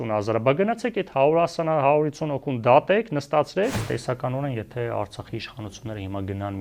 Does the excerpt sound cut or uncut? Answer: cut